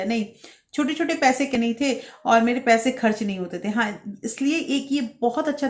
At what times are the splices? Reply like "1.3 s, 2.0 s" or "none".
1.6 s